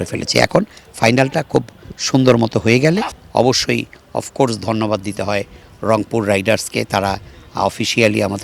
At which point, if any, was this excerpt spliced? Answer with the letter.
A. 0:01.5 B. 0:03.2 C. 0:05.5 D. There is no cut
B